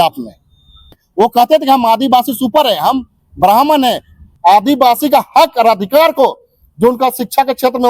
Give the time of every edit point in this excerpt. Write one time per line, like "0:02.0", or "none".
0:01.0
0:04.2